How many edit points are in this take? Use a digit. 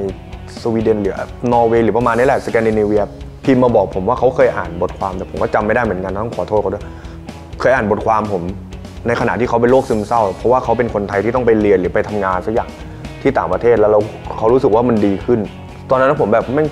0